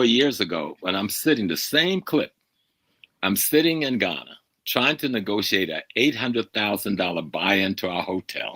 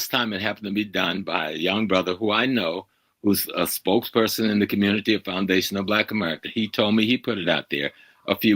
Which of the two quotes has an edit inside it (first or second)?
first